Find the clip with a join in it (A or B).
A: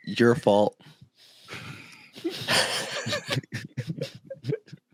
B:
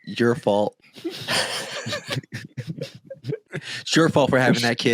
B